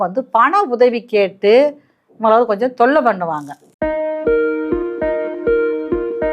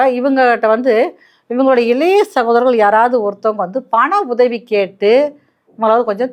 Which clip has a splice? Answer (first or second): first